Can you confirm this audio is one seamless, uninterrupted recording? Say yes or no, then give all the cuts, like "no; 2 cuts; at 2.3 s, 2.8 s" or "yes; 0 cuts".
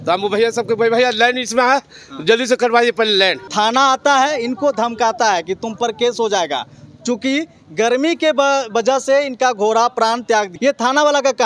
no; 2 cuts; at 3.4 s, 10.5 s